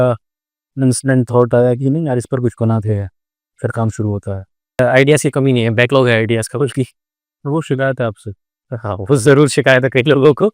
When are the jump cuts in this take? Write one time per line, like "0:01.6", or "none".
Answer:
0:04.8